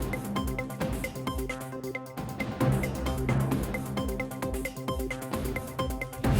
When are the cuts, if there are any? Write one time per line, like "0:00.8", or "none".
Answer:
0:01.1